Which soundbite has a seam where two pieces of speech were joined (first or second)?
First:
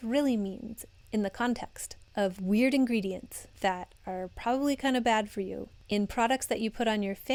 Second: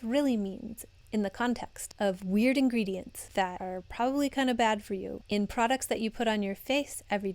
second